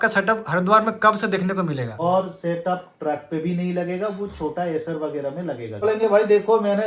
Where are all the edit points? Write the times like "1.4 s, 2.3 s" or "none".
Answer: 1.9 s, 5.8 s